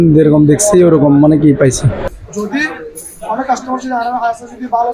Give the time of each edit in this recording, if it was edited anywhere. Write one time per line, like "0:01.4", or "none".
0:02.1